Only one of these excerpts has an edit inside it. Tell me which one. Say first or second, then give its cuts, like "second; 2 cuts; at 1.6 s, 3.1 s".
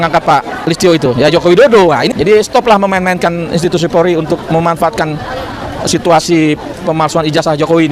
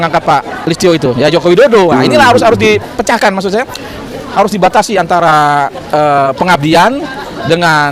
first; 1 cut; at 2.0 s